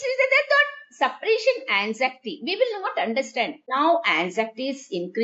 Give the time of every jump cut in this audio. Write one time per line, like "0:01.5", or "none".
0:03.6